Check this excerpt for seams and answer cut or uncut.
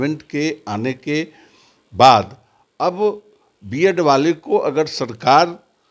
uncut